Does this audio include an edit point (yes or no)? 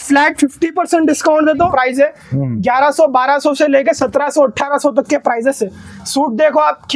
yes